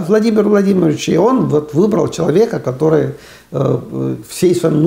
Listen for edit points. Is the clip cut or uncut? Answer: uncut